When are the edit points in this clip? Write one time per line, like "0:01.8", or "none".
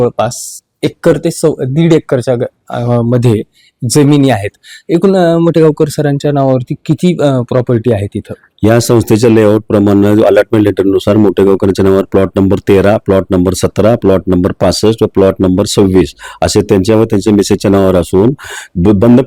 none